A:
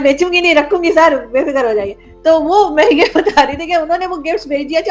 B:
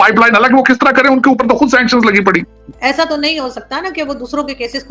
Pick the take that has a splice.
B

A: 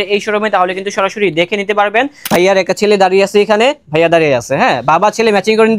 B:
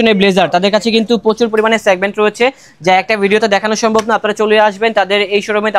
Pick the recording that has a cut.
A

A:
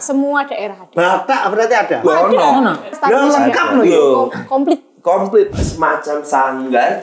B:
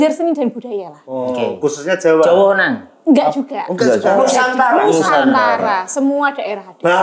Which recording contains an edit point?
A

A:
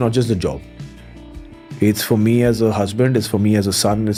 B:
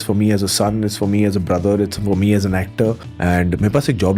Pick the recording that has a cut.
B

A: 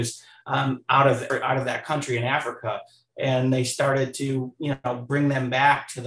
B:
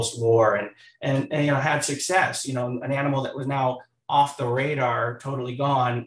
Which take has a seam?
A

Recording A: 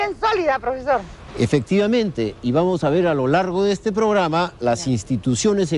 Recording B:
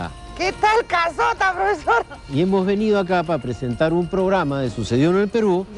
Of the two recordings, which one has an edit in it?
A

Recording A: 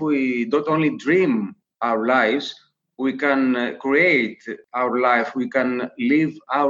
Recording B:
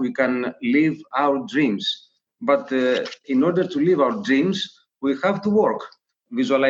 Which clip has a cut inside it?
B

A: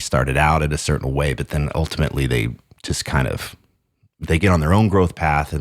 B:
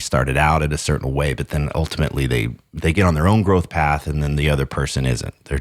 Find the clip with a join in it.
B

